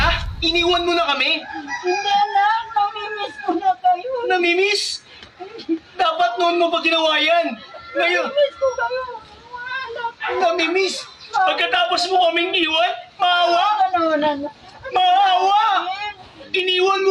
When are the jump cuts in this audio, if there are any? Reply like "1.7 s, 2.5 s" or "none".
none